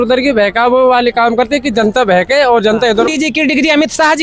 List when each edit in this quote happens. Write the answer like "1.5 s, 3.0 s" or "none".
3.1 s

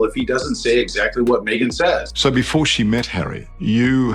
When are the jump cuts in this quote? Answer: 2.1 s

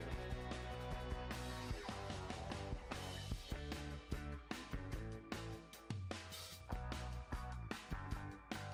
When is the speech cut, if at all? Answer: none

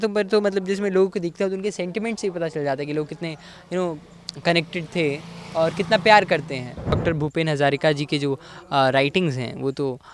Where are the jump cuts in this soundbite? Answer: 7.0 s

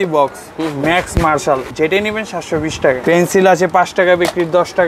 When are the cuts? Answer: 1.7 s, 3.0 s

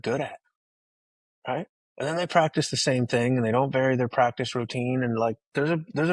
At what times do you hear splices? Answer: 1.8 s

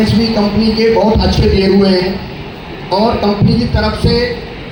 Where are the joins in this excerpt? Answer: none

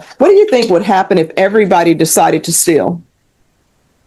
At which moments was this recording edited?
none

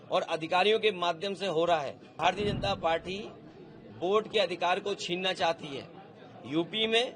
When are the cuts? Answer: 2.2 s

